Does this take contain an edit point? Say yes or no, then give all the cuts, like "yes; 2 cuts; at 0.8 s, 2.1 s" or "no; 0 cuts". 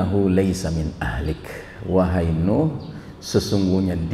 no; 0 cuts